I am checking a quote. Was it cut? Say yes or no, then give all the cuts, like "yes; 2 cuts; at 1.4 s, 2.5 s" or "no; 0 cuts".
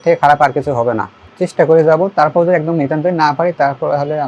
yes; 1 cut; at 1.2 s